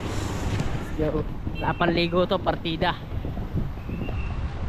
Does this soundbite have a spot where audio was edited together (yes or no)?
no